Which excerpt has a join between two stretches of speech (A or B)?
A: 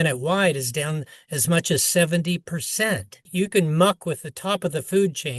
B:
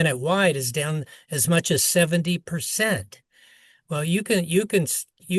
A